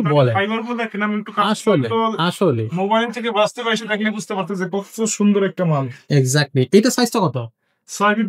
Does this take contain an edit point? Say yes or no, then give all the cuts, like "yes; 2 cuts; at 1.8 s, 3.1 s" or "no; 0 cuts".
no; 0 cuts